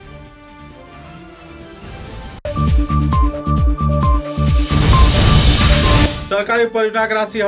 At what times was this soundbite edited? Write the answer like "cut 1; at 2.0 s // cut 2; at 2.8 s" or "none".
cut 1; at 6.2 s